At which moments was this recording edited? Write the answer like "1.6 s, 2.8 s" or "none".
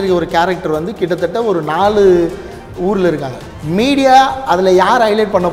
3.4 s